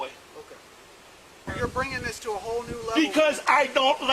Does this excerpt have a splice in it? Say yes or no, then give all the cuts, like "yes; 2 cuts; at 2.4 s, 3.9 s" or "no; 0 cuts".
yes; 1 cut; at 1.5 s